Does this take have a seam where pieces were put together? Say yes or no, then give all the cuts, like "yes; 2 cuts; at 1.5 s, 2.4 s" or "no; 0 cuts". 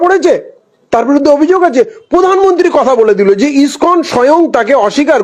no; 0 cuts